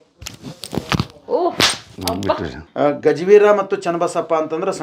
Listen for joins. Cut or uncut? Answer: cut